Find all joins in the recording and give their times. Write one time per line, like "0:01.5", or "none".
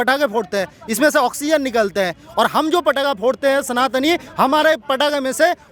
none